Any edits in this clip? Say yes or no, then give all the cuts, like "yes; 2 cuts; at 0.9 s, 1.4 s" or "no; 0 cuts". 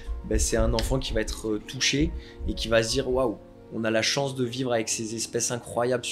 no; 0 cuts